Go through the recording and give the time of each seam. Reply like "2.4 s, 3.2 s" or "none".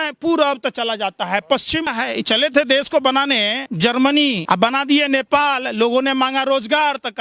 1.9 s, 3.6 s, 4.4 s